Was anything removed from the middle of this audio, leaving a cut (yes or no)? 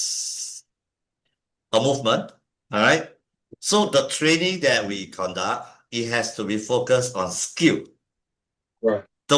no